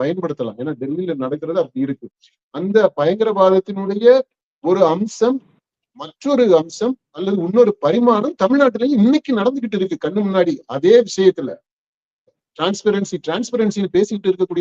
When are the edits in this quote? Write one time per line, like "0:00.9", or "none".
0:12.4